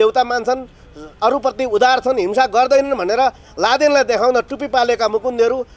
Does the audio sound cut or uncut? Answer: uncut